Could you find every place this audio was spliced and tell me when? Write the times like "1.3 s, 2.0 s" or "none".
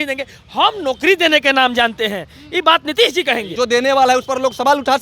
3.5 s